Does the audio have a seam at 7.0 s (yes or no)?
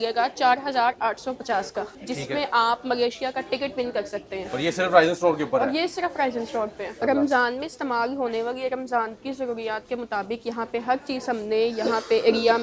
yes